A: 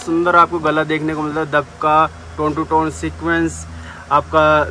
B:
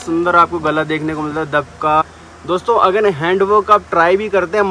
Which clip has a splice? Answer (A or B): B